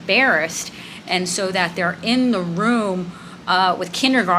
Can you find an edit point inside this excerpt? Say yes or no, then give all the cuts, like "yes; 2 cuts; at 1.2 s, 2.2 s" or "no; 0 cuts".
no; 0 cuts